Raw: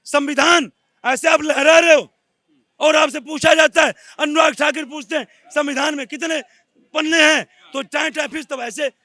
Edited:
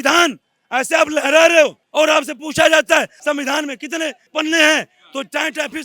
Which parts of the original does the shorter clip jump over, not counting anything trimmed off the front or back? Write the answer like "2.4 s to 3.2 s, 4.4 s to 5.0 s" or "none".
2.1 s to 2.7 s, 4.0 s to 5.4 s, 6.5 s to 6.8 s

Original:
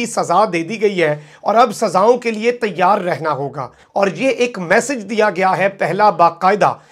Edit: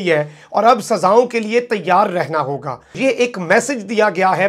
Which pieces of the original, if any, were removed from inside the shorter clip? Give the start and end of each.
3.9 s to 4.1 s

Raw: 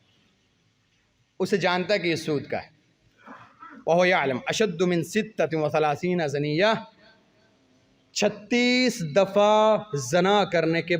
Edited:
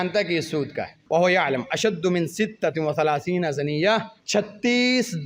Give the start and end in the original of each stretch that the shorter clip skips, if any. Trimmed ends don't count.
2.7 s to 3.7 s, 6.9 s to 8.0 s

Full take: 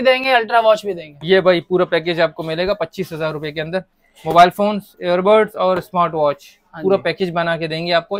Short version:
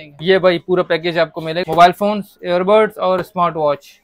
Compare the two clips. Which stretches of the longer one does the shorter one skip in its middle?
2.6 s to 4.2 s

